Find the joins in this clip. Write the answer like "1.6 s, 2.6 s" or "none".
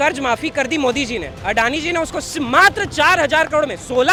none